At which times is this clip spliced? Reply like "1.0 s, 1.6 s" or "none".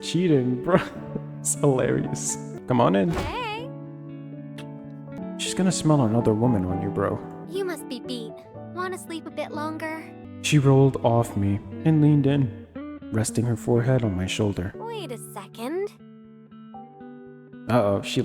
2.5 s, 5.2 s, 10.3 s